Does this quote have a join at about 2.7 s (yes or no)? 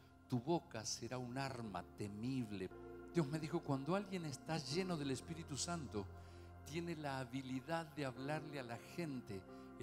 yes